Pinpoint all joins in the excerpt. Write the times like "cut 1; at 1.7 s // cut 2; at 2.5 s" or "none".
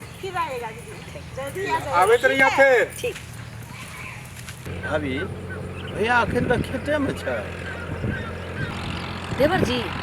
cut 1; at 4.7 s